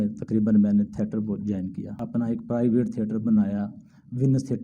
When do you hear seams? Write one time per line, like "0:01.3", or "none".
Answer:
0:02.0